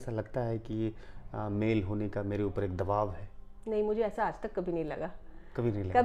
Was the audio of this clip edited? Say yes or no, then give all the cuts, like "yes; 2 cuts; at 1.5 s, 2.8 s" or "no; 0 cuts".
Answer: no; 0 cuts